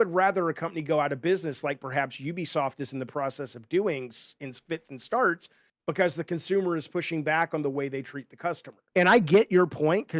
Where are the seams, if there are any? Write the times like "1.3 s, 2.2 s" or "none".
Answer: 8.7 s